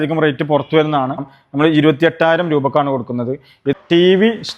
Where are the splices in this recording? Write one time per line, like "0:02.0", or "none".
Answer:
0:01.4
0:03.7